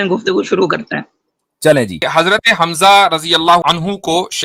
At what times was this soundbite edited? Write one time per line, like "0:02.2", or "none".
0:02.0
0:03.6